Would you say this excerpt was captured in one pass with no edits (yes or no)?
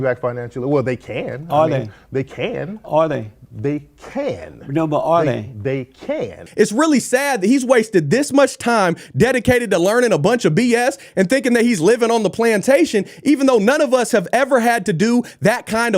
no